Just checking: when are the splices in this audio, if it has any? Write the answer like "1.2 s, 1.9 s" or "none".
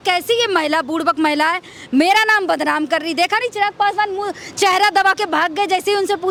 none